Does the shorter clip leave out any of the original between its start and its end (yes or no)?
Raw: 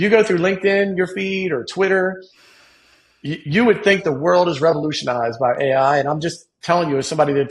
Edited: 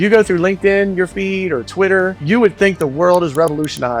yes